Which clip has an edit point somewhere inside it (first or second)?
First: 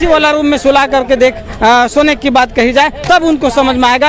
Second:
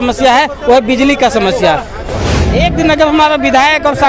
second